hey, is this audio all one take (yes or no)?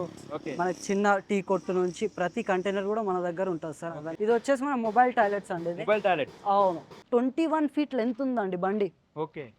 no